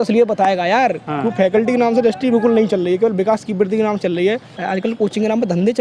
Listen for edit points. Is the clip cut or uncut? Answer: cut